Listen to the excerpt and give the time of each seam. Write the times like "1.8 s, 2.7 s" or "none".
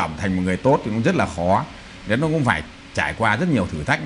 none